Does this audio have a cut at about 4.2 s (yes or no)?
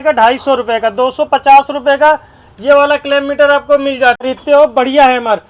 yes